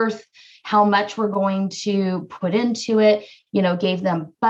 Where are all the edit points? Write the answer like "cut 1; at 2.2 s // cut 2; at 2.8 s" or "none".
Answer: none